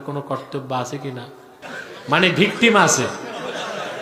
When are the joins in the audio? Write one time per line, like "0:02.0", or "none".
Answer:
0:01.7